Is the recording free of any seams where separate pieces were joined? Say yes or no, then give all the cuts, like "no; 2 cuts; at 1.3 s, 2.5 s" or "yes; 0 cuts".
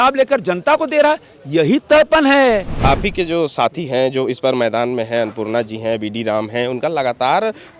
no; 1 cut; at 2.7 s